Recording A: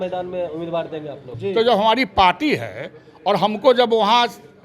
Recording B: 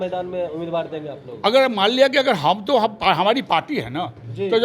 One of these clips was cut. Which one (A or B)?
A